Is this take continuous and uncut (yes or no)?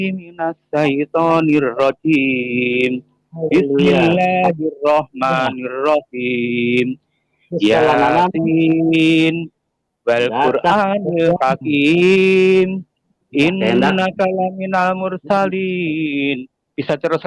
yes